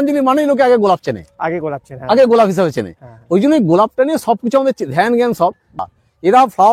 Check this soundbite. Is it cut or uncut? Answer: cut